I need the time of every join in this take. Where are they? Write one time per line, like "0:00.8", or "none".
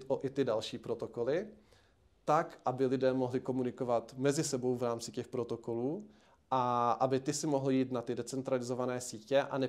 none